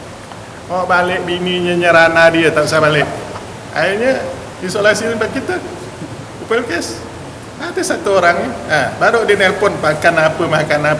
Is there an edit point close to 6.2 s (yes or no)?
no